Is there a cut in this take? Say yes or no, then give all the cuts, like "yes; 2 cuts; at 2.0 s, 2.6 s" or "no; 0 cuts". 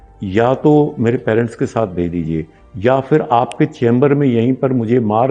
no; 0 cuts